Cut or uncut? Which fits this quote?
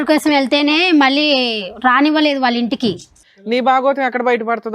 cut